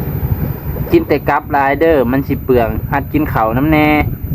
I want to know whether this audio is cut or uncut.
uncut